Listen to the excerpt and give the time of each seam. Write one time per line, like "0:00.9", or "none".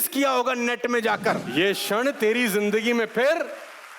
0:01.4